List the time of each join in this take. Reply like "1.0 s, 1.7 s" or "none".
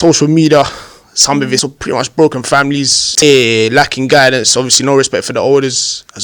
1.6 s, 3.2 s